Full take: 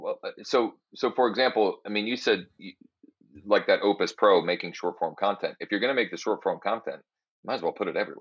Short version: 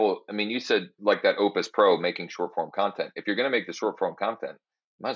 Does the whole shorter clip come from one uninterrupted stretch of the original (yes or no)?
no